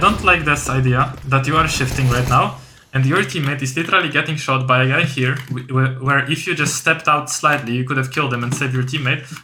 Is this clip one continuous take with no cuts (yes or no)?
yes